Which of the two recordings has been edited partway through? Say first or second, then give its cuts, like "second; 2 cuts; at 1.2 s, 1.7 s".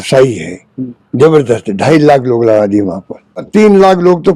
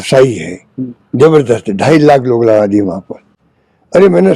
first; 1 cut; at 3.4 s